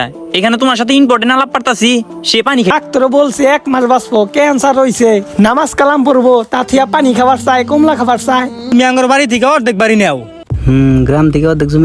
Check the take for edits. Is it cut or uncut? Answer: cut